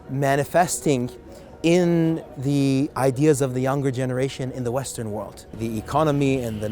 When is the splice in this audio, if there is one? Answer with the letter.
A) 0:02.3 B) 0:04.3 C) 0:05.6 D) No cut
C